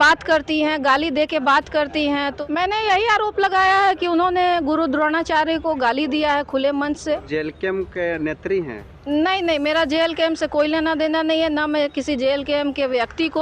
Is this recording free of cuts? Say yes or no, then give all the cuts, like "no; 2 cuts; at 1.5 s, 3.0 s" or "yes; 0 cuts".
no; 2 cuts; at 2.3 s, 7.3 s